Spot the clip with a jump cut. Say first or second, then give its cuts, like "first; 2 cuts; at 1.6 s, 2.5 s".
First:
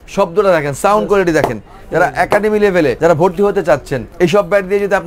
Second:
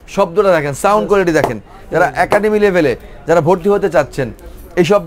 first; 2 cuts; at 3.0 s, 4.0 s